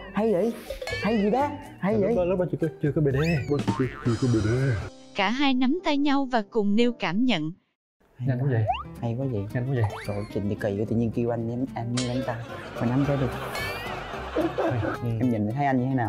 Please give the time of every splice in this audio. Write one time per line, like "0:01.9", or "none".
0:04.9
0:15.0